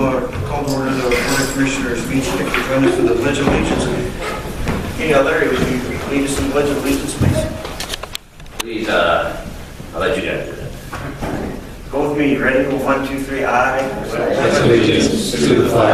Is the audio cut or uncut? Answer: uncut